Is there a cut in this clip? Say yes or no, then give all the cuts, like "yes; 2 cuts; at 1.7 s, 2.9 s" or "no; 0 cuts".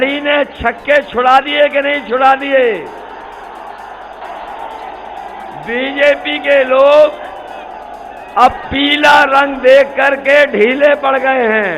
yes; 1 cut; at 4.2 s